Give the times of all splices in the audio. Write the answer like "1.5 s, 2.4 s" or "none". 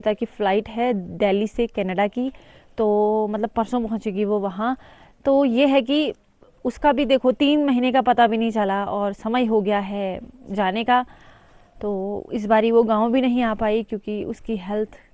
none